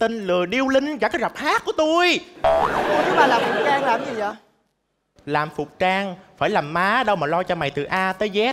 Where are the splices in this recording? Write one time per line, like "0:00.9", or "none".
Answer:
none